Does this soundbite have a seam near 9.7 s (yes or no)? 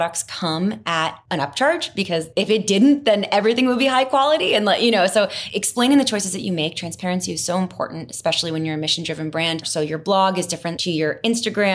yes